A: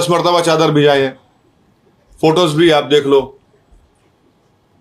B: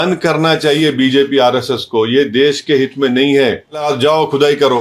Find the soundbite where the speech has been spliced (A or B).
B